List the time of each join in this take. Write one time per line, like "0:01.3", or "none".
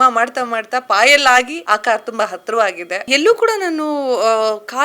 0:01.6
0:03.1

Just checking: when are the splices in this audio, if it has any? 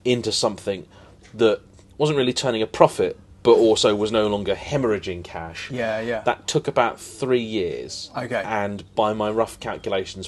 none

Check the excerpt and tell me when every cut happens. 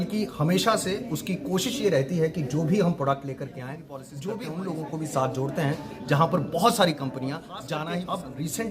0:04.1
0:07.9

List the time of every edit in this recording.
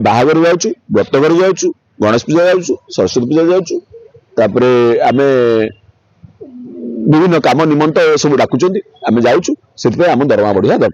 none

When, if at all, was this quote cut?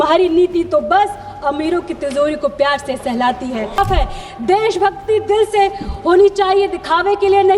0:03.8

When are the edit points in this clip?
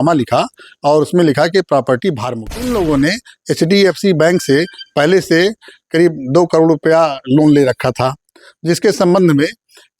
0:02.7

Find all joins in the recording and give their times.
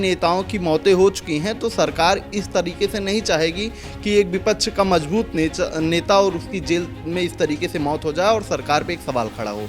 none

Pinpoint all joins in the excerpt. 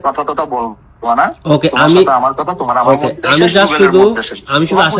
none

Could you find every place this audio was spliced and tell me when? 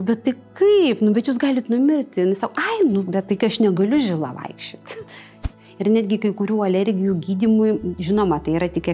0:05.4

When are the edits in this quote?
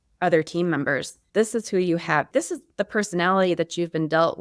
0:01.1
0:02.3

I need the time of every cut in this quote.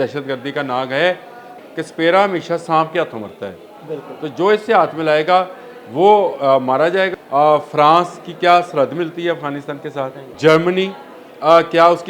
0:01.5
0:07.1
0:10.2

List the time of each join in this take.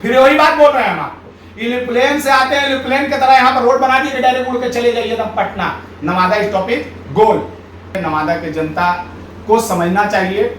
0:08.0

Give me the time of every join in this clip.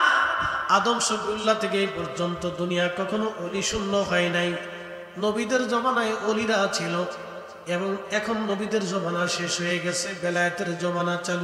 none

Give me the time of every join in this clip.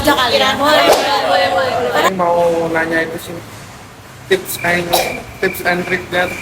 0:02.1

